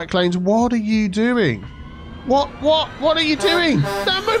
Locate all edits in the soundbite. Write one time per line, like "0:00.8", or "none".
0:02.9